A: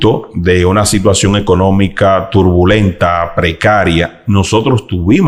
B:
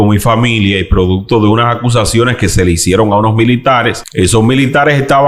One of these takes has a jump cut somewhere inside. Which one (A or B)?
B